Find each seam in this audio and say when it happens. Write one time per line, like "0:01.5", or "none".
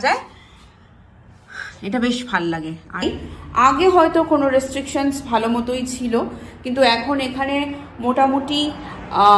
0:03.0

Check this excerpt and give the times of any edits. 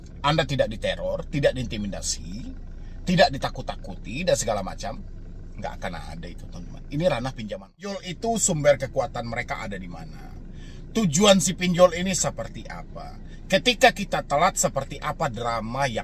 0:08.1

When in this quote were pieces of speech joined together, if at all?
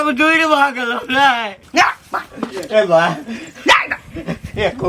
0:01.6

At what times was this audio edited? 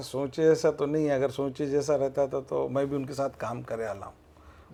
none

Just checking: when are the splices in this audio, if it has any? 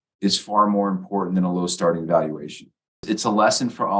0:03.0

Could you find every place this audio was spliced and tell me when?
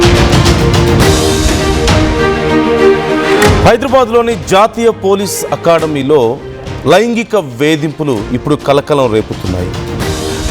0:03.6

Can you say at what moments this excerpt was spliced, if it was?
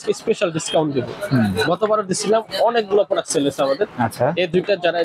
none

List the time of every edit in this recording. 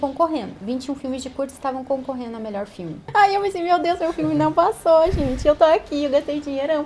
0:03.0

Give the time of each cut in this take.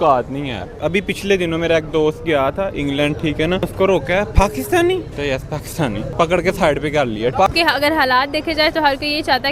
0:00.8
0:03.7
0:05.1
0:06.1
0:07.4

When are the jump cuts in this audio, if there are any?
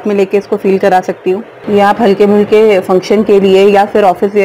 0:01.5

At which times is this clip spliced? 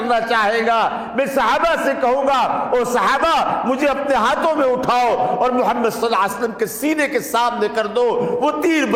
none

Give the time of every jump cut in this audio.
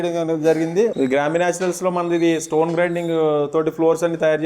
0:00.9

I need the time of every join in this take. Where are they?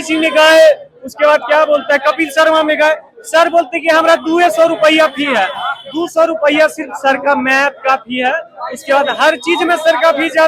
none

